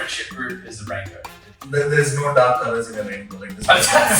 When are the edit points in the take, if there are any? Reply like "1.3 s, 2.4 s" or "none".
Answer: 1.5 s